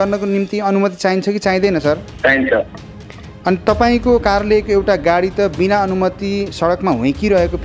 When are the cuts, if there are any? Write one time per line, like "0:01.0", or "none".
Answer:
0:02.1